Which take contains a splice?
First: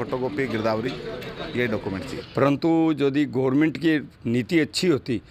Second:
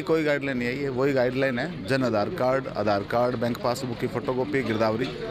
first; 1 cut; at 2.2 s

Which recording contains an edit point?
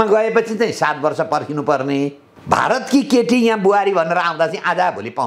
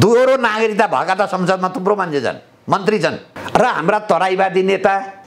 second; 1 cut; at 3.3 s

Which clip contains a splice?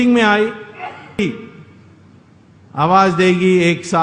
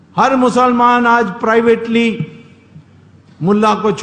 first; 1 cut; at 1.2 s

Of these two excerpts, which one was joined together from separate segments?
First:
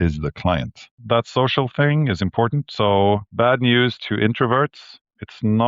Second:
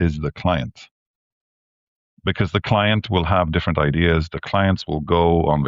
first; 2 cuts; at 1.0 s, 3.3 s

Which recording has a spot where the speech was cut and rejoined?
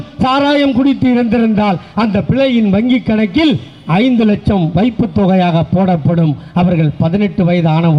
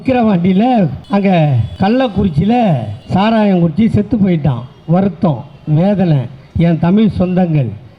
second; 3 cuts; at 1.0 s, 1.6 s, 2.9 s

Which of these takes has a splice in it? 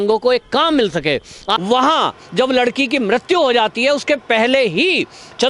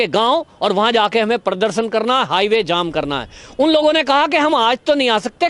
first; 1 cut; at 1.6 s

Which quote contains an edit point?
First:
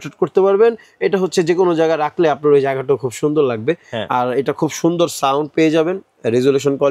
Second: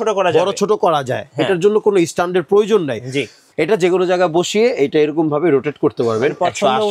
second; 1 cut; at 3.4 s

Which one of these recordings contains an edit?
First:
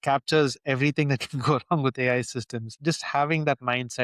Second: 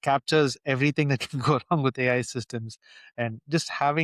first; 1 cut; at 2.7 s

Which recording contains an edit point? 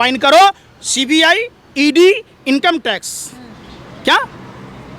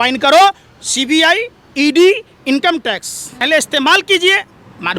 second; 1 cut; at 3.4 s

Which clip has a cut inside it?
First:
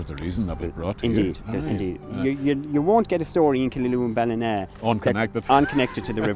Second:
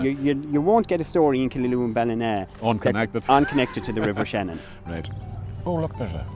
second; 1 cut; at 5.1 s

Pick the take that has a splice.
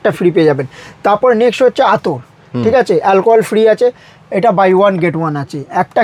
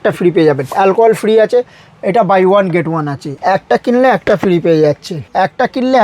second; 3 cuts; at 0.7 s, 3.2 s, 5.1 s

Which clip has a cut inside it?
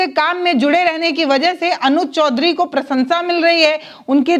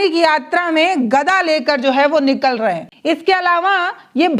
second; 1 cut; at 2.9 s

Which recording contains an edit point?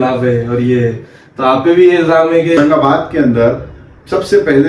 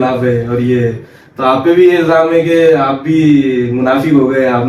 first; 1 cut; at 2.6 s

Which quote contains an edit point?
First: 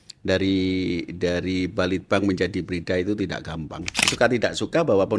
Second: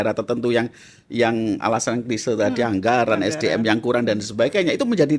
first; 1 cut; at 4.1 s

